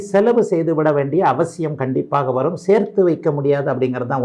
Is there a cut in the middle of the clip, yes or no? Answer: no